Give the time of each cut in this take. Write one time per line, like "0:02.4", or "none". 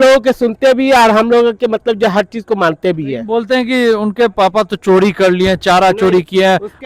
none